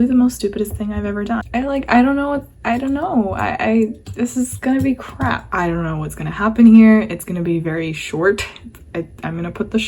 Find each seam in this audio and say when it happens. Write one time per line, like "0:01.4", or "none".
0:01.5
0:05.5